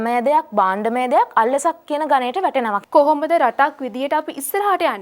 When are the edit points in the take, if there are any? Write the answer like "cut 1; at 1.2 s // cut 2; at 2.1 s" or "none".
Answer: cut 1; at 2.8 s